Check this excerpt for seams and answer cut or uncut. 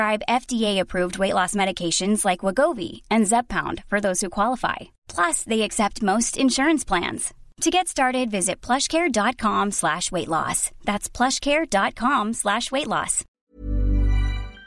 cut